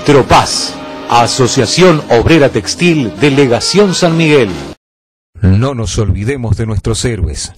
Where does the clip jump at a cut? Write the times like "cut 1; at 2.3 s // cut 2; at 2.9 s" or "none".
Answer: cut 1; at 4.6 s